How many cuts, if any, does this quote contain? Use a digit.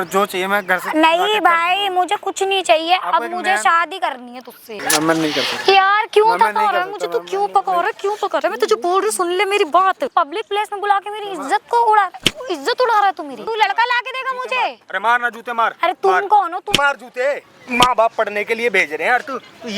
4